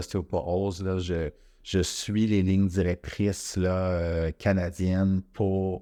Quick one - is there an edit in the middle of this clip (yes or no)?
no